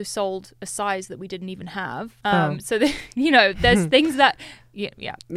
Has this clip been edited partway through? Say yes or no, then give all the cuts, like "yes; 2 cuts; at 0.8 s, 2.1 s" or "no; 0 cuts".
yes; 1 cut; at 2.1 s